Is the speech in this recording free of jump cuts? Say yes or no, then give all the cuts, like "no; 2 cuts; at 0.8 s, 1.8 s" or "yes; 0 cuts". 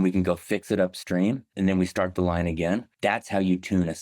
no; 2 cuts; at 1.5 s, 2.9 s